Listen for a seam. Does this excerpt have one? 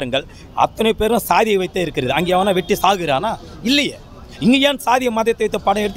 no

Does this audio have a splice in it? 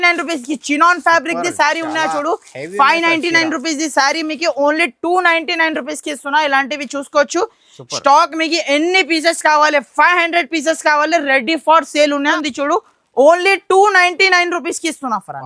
yes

